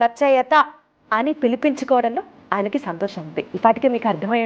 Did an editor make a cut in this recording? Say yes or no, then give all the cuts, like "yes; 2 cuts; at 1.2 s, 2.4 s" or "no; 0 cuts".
yes; 1 cut; at 3.5 s